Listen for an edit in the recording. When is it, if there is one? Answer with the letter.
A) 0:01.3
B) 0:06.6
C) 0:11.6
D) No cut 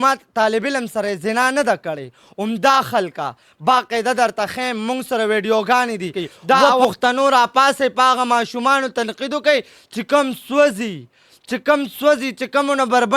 B